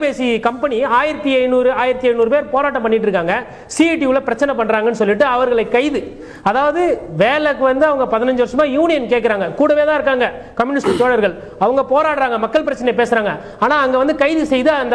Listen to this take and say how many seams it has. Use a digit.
0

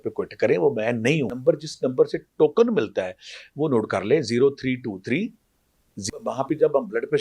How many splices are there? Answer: 2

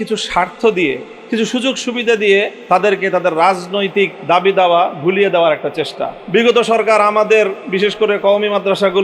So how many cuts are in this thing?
4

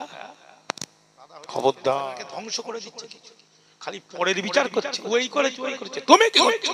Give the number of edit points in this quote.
1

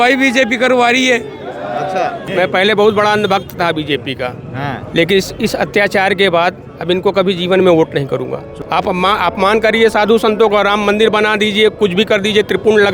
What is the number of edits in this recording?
2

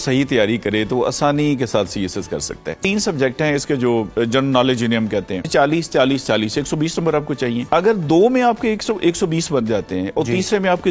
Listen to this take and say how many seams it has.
3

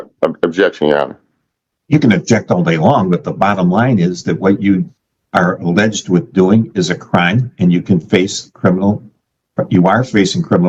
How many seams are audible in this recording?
0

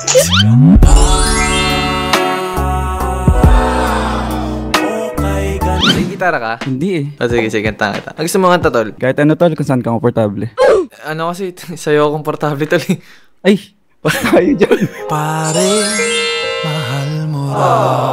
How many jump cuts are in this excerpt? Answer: 1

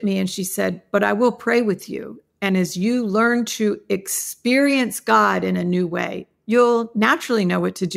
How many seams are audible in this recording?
1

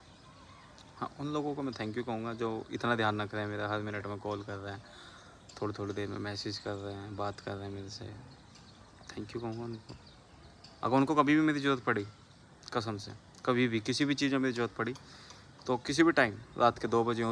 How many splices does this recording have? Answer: 0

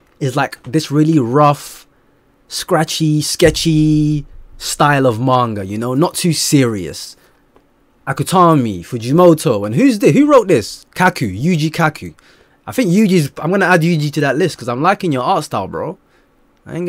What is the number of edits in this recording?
1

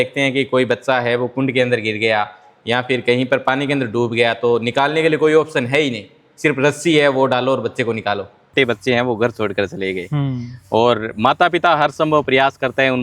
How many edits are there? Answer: 1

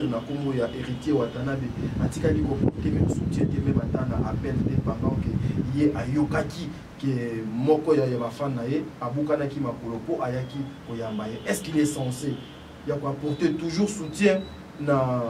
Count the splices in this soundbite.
0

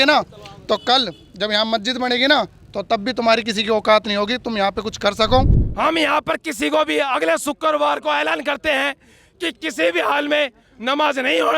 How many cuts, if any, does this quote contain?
1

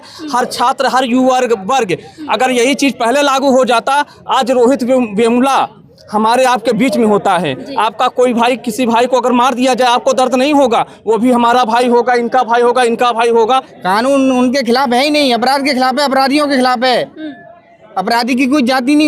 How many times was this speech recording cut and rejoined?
1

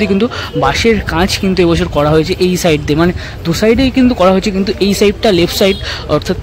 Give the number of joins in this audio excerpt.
0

